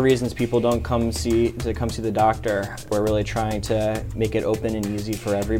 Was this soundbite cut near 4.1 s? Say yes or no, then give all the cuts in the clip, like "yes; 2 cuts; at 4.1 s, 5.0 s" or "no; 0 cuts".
yes; 2 cuts; at 2.9 s, 4.1 s